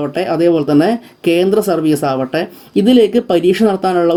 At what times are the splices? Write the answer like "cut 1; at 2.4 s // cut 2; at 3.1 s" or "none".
none